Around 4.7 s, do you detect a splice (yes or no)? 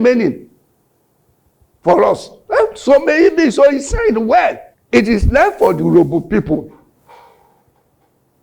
yes